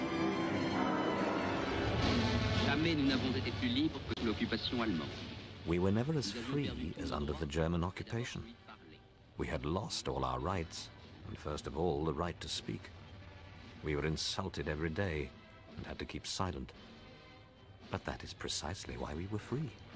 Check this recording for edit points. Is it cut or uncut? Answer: uncut